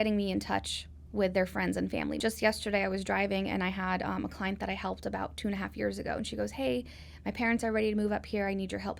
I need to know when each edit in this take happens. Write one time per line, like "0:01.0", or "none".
0:02.2